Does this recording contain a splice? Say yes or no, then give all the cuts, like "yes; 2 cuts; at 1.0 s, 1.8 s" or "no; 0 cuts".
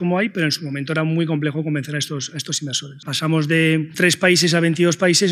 yes; 2 cuts; at 3.1 s, 3.9 s